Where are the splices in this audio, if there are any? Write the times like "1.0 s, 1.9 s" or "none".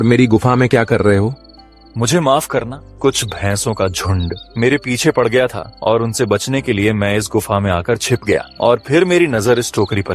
2.8 s, 4.4 s, 5.7 s, 8.5 s

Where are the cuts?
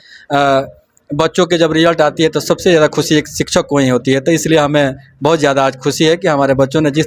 none

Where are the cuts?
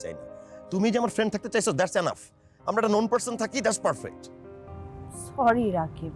none

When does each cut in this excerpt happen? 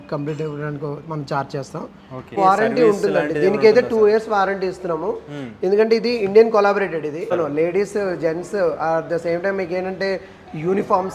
2.3 s, 7.3 s

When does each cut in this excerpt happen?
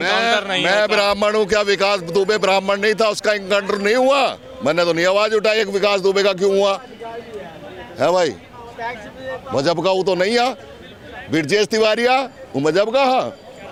none

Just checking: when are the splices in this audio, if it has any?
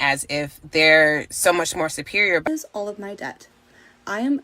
2.5 s

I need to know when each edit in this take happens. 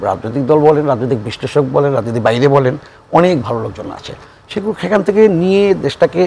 none

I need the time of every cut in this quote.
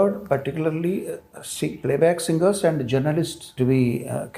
3.5 s

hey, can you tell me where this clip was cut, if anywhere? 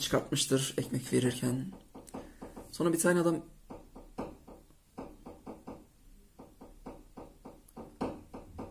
none

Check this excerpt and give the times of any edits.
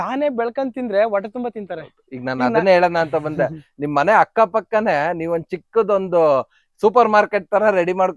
none

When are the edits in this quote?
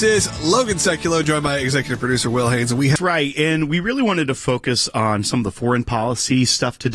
3.0 s

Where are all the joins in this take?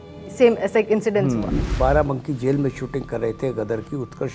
1.7 s

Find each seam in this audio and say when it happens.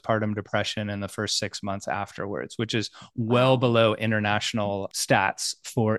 4.9 s

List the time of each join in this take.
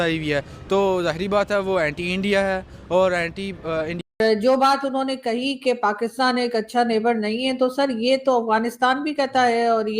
3.9 s

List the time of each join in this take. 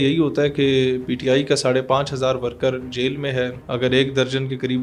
3.6 s

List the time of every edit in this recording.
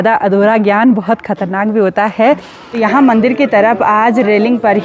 2.6 s

